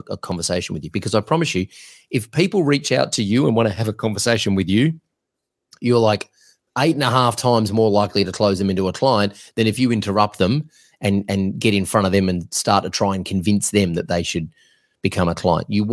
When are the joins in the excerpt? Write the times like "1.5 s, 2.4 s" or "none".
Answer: none